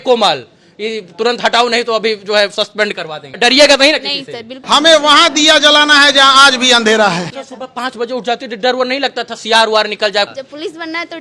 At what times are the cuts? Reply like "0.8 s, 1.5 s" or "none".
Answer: 3.3 s, 4.6 s, 7.2 s, 10.3 s